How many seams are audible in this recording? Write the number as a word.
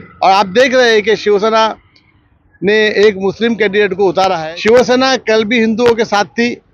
one